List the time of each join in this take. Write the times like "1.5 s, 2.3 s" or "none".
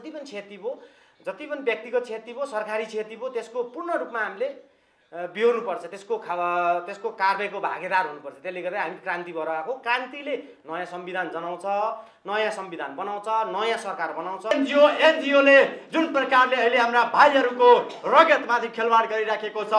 14.5 s